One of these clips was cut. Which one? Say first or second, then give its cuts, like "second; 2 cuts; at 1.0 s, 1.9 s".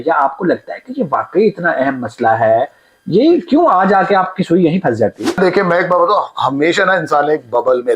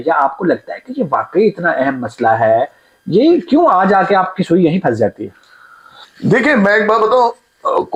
first; 1 cut; at 5.4 s